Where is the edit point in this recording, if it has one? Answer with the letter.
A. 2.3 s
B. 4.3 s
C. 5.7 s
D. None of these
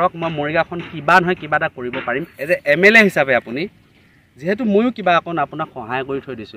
A